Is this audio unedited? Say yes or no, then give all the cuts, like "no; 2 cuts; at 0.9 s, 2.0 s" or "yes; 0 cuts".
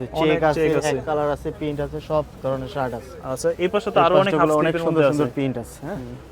yes; 0 cuts